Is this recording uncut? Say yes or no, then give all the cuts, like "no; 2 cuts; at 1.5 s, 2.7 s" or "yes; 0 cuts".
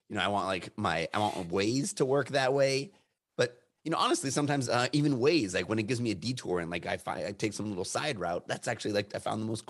yes; 0 cuts